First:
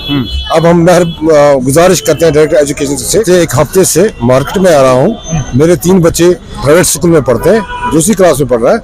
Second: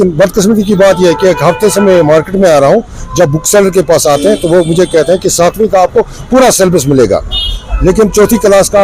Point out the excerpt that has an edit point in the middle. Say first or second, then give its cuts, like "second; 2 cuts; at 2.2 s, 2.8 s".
first; 2 cuts; at 3.2 s, 7.9 s